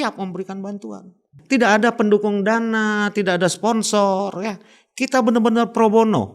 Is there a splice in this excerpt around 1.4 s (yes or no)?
yes